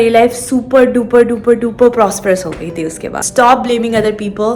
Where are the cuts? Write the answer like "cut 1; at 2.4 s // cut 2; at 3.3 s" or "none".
cut 1; at 3.2 s